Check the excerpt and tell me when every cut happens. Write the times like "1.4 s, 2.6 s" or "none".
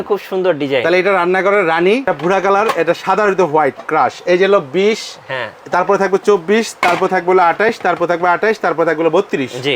2.1 s